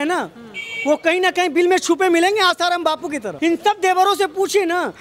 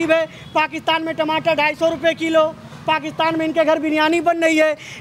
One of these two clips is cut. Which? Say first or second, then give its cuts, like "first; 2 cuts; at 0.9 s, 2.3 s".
first; 1 cut; at 3.3 s